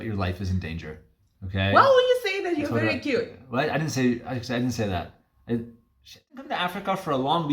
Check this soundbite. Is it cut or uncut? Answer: cut